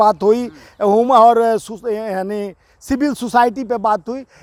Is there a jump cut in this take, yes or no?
no